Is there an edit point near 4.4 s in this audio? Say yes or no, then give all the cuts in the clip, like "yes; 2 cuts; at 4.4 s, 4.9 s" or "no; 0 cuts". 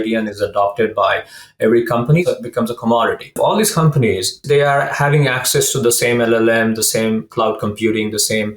yes; 3 cuts; at 2.2 s, 3.4 s, 4.4 s